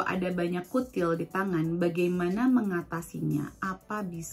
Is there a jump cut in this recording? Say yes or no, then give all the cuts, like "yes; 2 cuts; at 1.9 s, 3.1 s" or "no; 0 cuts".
no; 0 cuts